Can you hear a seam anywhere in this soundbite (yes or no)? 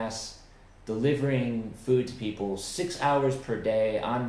no